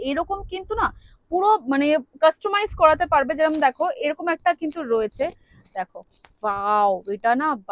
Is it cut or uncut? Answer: uncut